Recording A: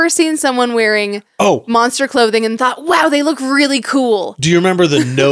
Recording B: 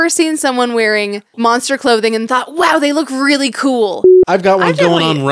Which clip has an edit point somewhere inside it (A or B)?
B